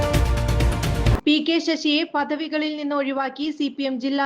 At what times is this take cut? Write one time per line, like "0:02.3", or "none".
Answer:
0:01.2